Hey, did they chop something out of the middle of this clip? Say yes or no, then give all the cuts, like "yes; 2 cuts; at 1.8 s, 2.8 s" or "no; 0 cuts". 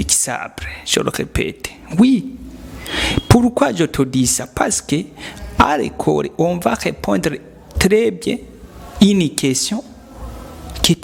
no; 0 cuts